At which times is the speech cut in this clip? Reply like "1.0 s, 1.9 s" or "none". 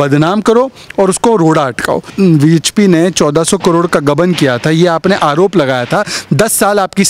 2.1 s